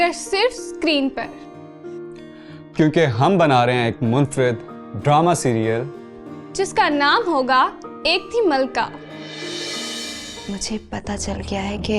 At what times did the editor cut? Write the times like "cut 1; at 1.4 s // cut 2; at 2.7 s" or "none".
cut 1; at 10.3 s